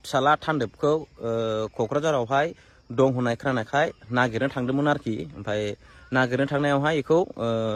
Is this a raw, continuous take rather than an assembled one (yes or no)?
yes